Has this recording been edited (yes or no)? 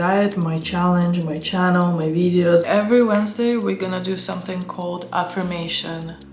yes